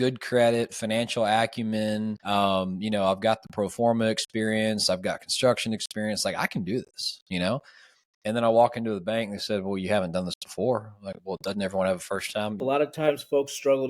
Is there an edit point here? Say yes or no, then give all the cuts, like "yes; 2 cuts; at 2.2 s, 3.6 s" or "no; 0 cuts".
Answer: yes; 2 cuts; at 2.2 s, 12.6 s